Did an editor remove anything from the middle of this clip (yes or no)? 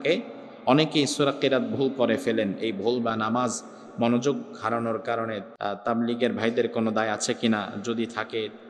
yes